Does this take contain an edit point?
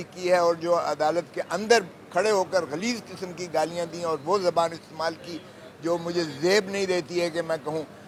no; 0 cuts

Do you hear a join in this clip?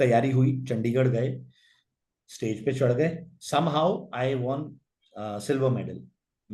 no; 0 cuts

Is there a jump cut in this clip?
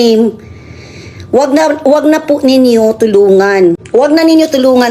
yes; 1 cut; at 3.8 s

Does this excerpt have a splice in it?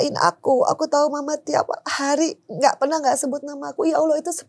no; 0 cuts

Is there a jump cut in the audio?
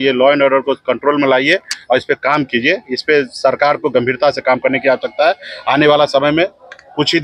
no; 0 cuts

